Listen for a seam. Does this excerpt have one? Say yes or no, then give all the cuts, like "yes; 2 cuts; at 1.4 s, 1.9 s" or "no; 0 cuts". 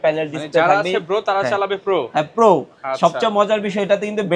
no; 0 cuts